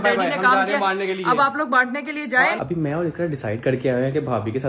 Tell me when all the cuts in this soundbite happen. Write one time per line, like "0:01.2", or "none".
0:02.6

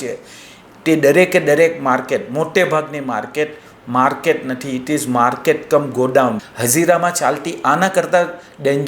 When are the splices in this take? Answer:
0:06.4

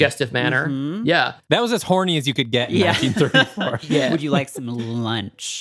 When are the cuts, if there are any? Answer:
none

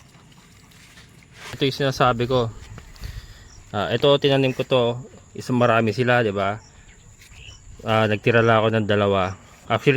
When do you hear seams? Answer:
0:01.6

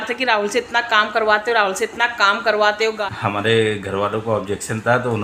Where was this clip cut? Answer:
0:03.0

